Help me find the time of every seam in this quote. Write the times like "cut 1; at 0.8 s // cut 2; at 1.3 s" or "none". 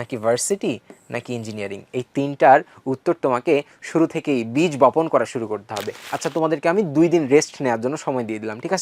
cut 1; at 6.1 s

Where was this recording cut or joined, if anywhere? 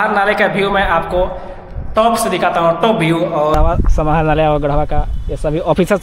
cut 1; at 3.5 s

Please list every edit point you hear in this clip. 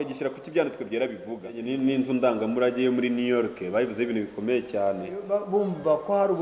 cut 1; at 1.7 s // cut 2; at 5.2 s

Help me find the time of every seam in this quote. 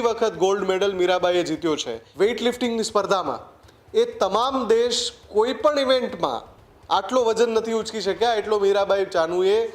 cut 1; at 2.0 s

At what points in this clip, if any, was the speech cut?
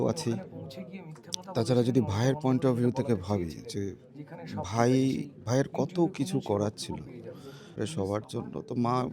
cut 1; at 7.8 s

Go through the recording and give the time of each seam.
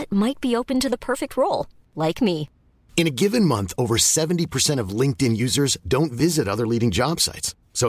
none

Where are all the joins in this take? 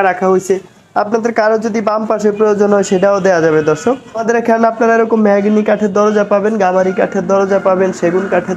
cut 1; at 4.2 s

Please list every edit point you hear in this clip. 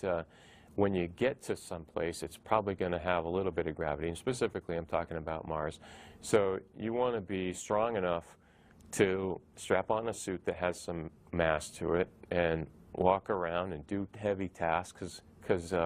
cut 1; at 4.6 s

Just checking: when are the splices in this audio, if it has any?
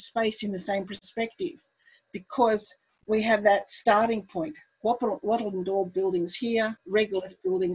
cut 1; at 1.0 s // cut 2; at 6.8 s

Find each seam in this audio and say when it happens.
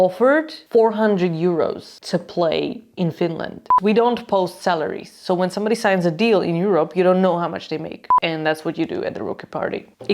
cut 1; at 3.7 s // cut 2; at 8.1 s

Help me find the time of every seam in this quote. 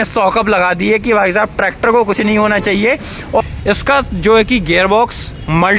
cut 1; at 3.4 s

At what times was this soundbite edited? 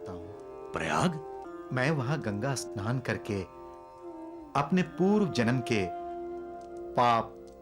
cut 1; at 1.4 s

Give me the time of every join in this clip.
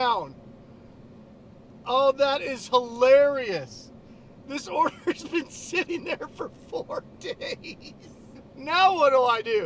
cut 1; at 8.3 s

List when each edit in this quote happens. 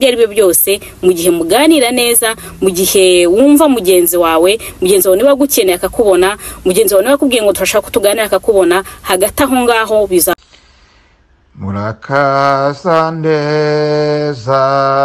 cut 1; at 10.3 s

